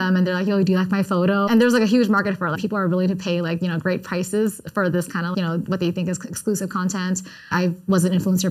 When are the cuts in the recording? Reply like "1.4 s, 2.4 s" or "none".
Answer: 1.5 s, 2.6 s, 5.3 s, 7.5 s